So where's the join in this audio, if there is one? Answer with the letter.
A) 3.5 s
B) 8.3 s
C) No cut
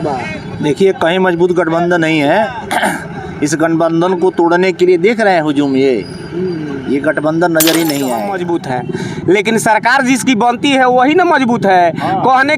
B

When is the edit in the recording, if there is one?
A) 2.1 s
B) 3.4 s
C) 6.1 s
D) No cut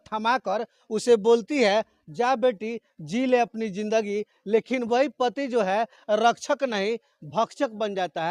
D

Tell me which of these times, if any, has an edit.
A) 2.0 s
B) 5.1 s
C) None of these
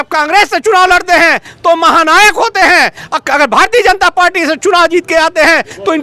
C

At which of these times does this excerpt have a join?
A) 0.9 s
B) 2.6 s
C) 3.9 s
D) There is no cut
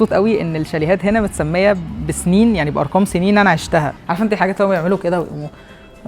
C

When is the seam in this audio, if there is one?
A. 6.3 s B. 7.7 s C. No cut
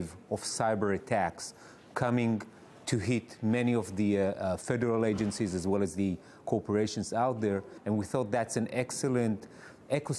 B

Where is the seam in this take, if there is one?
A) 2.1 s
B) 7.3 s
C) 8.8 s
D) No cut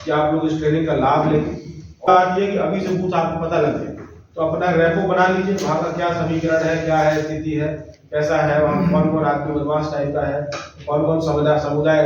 A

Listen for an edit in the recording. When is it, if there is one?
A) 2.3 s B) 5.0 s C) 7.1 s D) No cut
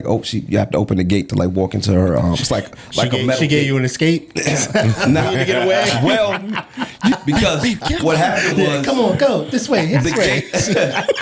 C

